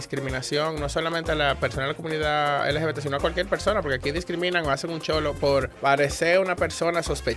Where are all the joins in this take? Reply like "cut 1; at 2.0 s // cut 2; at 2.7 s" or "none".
cut 1; at 5.7 s